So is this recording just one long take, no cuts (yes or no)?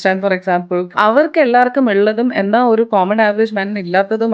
no